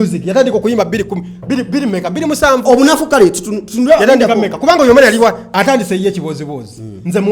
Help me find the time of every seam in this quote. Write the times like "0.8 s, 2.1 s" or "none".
5.5 s